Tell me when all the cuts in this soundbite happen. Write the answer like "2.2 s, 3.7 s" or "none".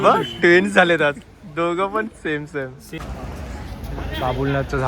3.0 s

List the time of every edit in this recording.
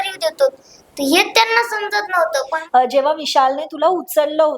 2.6 s

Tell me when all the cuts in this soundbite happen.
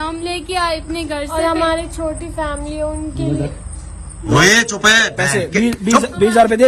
none

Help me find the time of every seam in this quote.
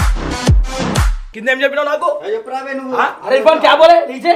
1.2 s

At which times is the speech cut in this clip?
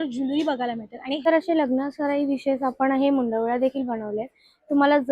1.3 s

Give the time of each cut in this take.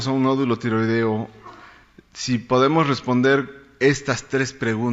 1.9 s

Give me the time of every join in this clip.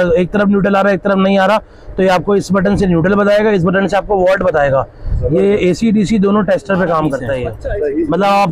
7.6 s

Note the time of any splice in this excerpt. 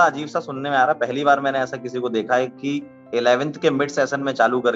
none

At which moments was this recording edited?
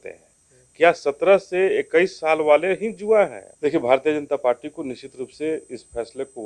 3.4 s

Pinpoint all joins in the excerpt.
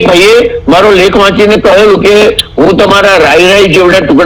none

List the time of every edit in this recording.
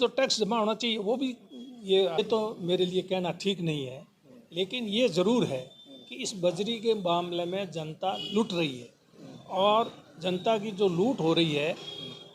2.2 s

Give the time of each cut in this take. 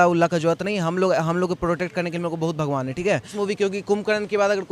3.3 s

